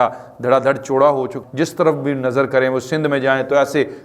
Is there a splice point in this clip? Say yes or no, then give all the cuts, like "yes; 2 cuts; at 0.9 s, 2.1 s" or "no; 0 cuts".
yes; 1 cut; at 1.3 s